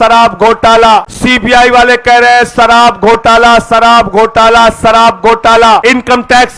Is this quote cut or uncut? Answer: cut